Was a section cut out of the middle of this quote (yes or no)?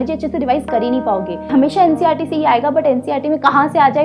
yes